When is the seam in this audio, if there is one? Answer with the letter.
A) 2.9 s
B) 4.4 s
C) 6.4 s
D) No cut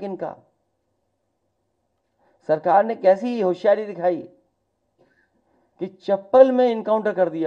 D